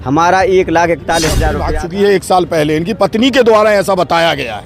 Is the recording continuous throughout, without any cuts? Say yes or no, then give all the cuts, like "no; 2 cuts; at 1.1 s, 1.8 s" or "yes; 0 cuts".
no; 1 cut; at 1.6 s